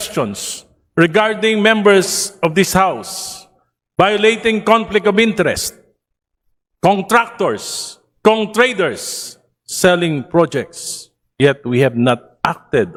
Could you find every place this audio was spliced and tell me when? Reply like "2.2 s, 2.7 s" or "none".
none